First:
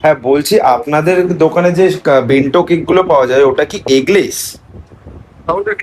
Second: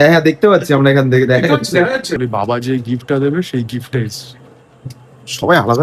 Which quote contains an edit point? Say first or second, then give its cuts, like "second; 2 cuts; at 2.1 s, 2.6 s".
second; 1 cut; at 2.2 s